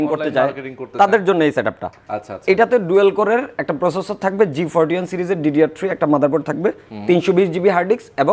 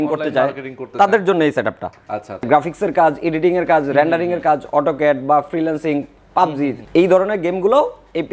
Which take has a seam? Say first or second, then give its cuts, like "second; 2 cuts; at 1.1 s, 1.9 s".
second; 1 cut; at 2.4 s